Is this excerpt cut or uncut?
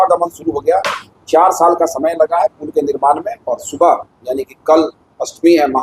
cut